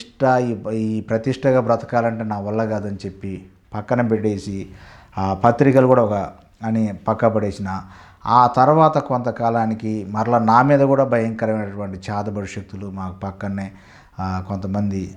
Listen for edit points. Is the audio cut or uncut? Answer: uncut